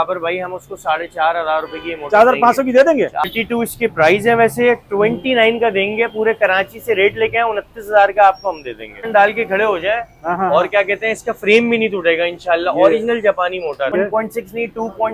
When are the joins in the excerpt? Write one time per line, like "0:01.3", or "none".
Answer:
0:03.2
0:09.0
0:13.9

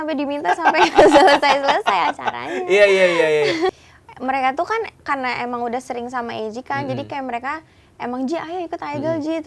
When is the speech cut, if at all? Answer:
0:03.7

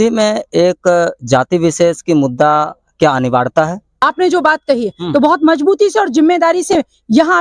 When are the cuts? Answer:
0:04.0

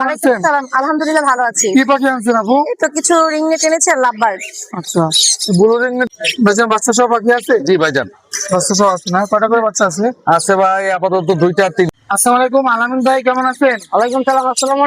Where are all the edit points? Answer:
0:06.1
0:11.9

